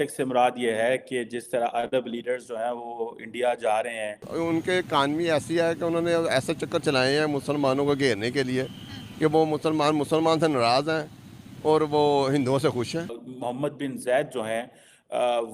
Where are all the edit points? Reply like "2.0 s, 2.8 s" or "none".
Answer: 4.2 s, 13.1 s